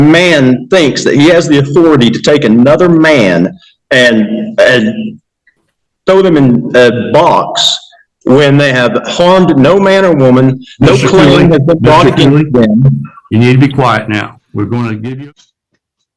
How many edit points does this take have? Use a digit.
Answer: 1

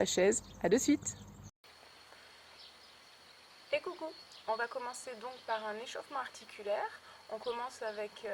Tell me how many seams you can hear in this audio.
1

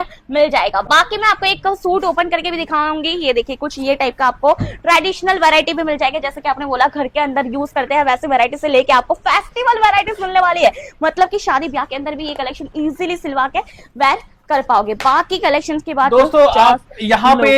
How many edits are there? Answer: 0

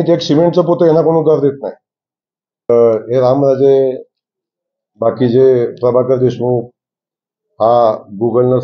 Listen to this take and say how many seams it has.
1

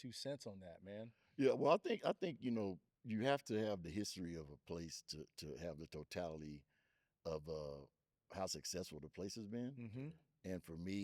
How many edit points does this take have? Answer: 1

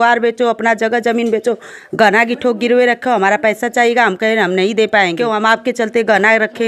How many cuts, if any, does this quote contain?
1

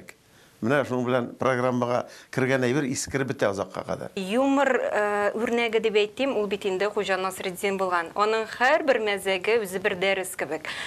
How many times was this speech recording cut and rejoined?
1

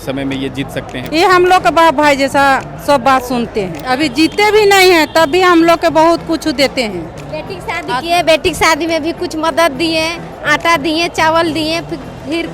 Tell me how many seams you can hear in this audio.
2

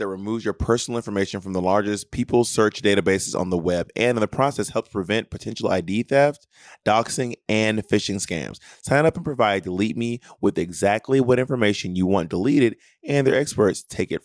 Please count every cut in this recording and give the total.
0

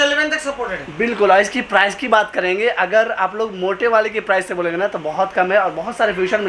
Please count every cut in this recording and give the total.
0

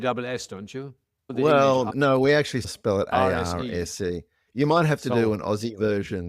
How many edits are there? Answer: 1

